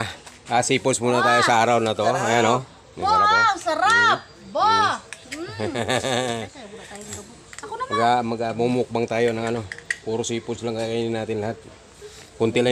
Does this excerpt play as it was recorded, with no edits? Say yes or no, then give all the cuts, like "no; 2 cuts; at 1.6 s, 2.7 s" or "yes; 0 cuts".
yes; 0 cuts